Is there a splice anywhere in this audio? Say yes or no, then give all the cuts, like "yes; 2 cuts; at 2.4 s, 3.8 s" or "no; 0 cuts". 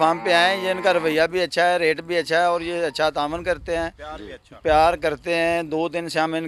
no; 0 cuts